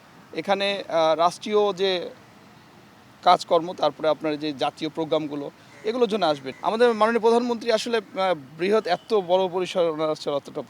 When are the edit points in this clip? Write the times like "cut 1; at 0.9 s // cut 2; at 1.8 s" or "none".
cut 1; at 6.5 s